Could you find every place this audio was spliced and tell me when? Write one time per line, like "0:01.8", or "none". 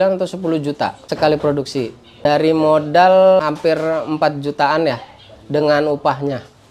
0:01.0
0:02.2
0:03.4